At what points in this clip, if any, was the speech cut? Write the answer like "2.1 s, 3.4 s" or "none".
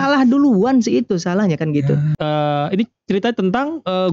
2.1 s

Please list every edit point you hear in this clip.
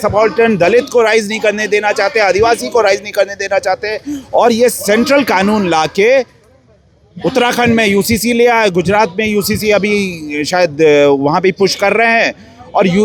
none

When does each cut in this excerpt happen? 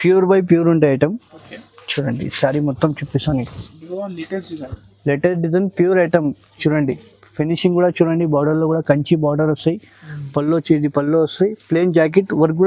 none

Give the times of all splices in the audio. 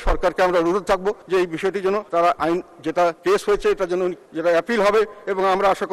1.2 s, 2.1 s, 3.2 s, 4.3 s

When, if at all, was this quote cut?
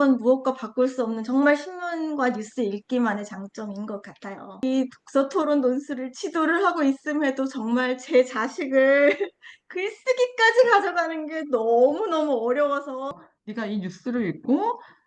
4.6 s, 13.1 s

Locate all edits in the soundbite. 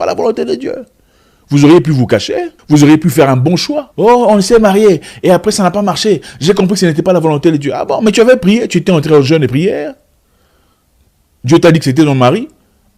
2.5 s

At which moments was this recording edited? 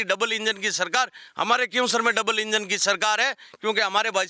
none

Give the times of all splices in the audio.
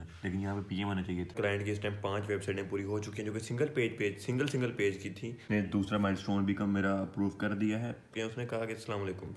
1.3 s, 5.5 s, 8.1 s

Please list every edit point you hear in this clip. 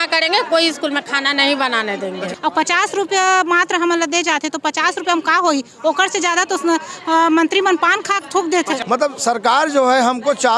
2.3 s, 8.8 s

